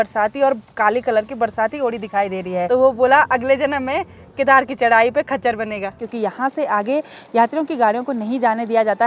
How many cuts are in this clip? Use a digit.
2